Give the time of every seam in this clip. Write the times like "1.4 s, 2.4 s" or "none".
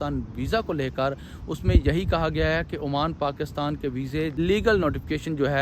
4.4 s